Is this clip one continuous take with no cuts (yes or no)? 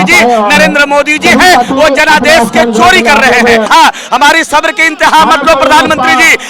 no